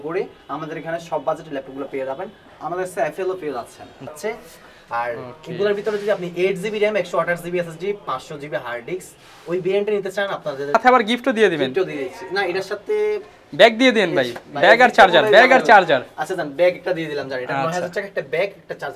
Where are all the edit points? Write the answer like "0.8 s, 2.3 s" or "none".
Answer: 4.1 s, 10.7 s